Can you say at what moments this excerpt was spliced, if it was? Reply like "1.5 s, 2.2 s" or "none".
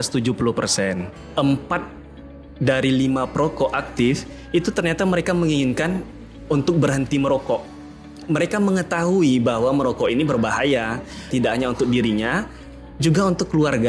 1.2 s, 8.2 s, 11.3 s